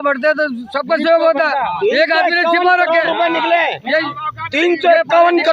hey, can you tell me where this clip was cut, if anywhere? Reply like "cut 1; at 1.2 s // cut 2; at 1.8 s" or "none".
none